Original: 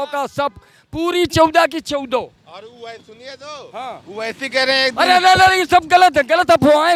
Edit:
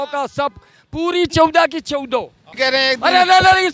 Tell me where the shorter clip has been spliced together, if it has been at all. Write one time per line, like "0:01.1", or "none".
0:02.4

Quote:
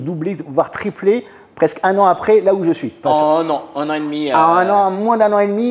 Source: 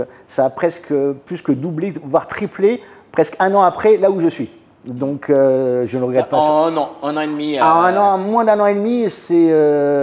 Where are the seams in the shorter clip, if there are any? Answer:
0:03.0

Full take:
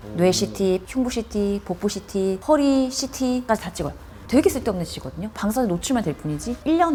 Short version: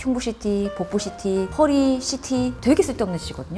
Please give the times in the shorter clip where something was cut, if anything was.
0:02.5

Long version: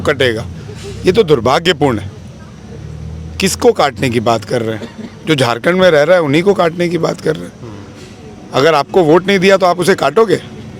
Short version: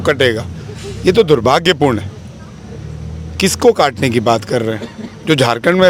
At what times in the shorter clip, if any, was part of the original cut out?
none

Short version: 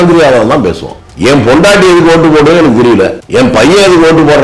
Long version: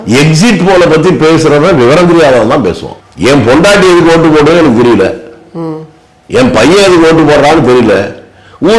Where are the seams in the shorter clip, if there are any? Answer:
0:03.2

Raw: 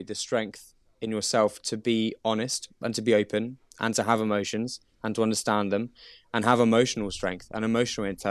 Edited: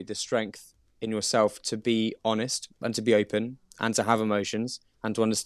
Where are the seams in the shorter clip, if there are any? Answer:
none

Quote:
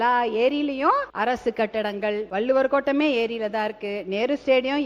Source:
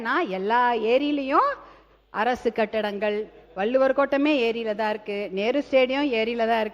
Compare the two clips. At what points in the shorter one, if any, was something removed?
0:01.1
0:02.3

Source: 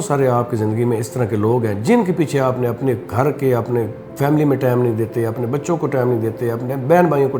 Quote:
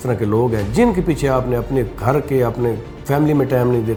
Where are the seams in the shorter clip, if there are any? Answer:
none

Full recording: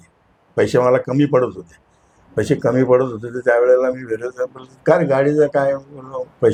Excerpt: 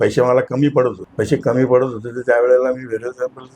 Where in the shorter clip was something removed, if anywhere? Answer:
0:01.0

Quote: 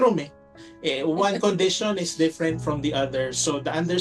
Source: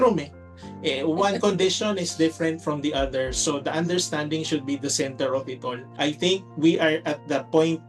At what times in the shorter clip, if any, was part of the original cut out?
none

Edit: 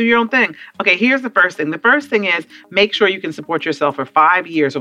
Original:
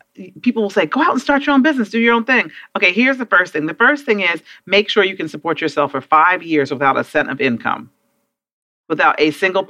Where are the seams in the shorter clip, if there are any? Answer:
none

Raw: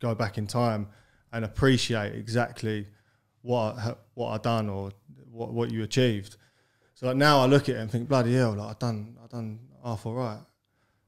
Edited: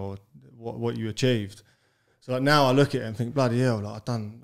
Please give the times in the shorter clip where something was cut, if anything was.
none

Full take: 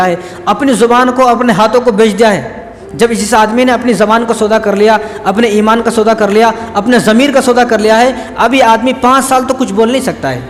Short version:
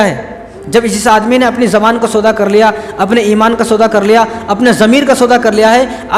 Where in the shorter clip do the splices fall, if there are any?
none

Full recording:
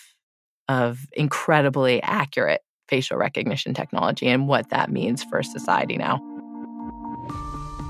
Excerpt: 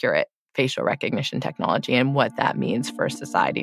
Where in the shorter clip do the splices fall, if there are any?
none

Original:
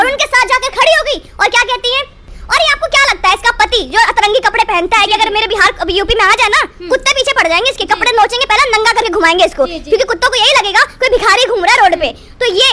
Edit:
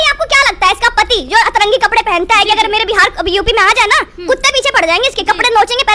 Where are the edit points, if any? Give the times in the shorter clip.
none

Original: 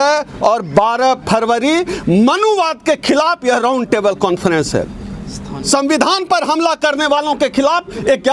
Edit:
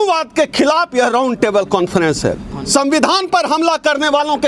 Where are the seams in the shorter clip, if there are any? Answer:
0:02.5

